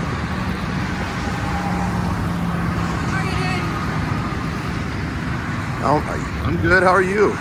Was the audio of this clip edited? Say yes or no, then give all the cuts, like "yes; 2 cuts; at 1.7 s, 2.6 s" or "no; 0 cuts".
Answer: no; 0 cuts